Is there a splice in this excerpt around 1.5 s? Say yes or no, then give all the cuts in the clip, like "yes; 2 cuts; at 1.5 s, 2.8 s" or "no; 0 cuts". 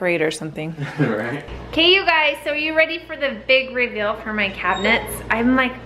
yes; 1 cut; at 1.5 s